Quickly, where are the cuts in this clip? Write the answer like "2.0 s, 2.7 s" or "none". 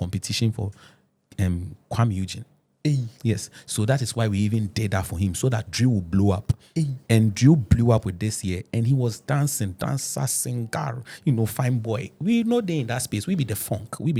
none